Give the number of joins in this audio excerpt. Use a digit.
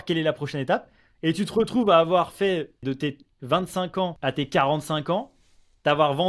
2